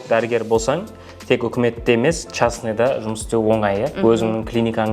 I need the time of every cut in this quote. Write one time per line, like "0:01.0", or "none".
none